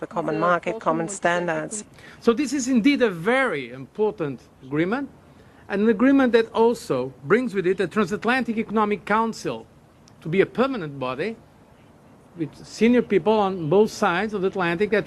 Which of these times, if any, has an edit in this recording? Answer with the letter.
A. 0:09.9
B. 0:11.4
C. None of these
B